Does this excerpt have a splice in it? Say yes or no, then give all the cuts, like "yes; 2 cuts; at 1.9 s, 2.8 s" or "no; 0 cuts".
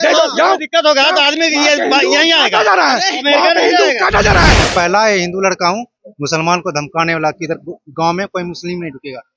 yes; 1 cut; at 4.6 s